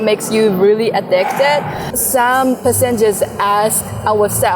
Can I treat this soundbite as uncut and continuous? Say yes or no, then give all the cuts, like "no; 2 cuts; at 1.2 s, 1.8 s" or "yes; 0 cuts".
no; 1 cut; at 1.9 s